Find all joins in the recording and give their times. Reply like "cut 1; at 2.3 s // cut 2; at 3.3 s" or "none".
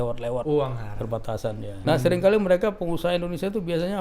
cut 1; at 1.7 s